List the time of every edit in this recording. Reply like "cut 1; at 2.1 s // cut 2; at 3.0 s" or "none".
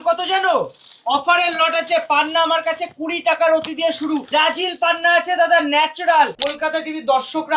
cut 1; at 4.2 s // cut 2; at 6.4 s